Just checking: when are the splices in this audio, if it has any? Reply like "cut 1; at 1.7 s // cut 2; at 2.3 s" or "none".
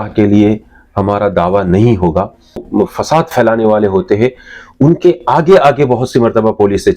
cut 1; at 2.7 s

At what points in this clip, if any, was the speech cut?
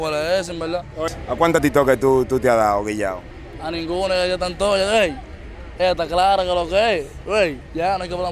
cut 1; at 1.1 s

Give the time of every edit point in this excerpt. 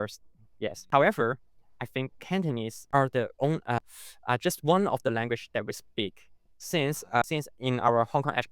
cut 1; at 0.9 s // cut 2; at 2.8 s // cut 3; at 3.8 s // cut 4; at 7.2 s

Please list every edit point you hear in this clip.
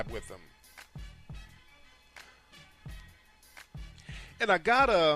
none

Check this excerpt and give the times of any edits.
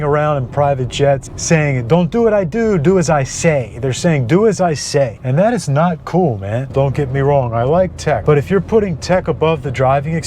cut 1; at 1.3 s // cut 2; at 5.2 s // cut 3; at 6.7 s // cut 4; at 8.2 s

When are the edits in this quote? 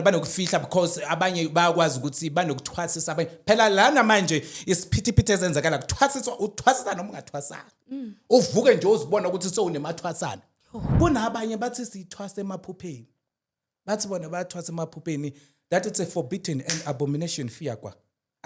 cut 1; at 10.9 s

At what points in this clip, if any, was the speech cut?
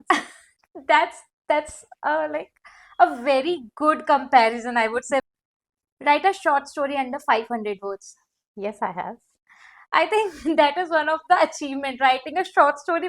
cut 1; at 5.2 s

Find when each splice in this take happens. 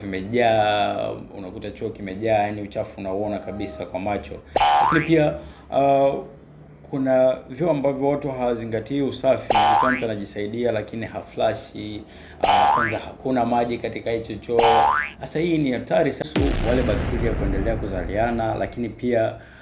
cut 1; at 16.2 s

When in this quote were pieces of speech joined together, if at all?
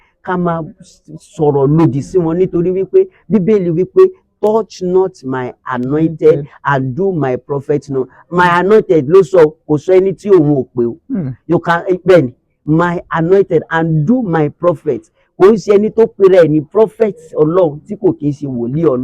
none

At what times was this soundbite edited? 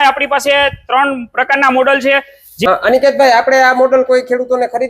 cut 1; at 2.4 s

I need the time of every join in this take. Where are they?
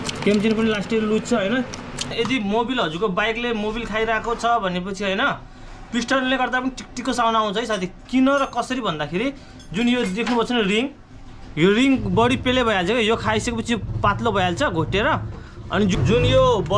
cut 1; at 2.1 s // cut 2; at 15.9 s

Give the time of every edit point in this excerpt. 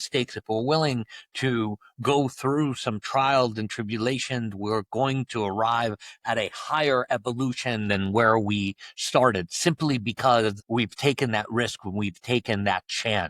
cut 1; at 10.6 s

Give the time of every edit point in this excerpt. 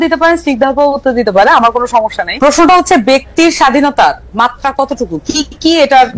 cut 1; at 2.2 s

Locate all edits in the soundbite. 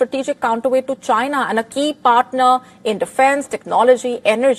none

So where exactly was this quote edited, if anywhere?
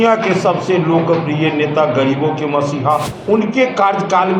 cut 1; at 3.1 s

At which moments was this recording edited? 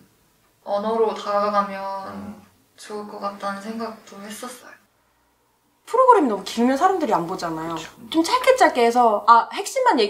cut 1; at 4.7 s

